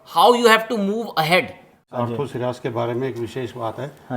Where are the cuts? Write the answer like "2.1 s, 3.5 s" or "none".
1.8 s